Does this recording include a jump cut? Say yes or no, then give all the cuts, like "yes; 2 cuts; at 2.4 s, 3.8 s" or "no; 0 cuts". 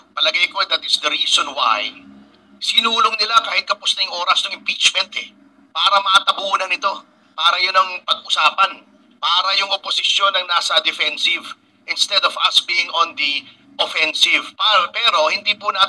no; 0 cuts